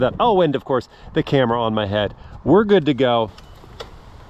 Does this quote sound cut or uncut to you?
cut